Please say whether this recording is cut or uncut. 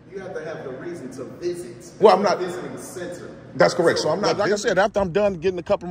cut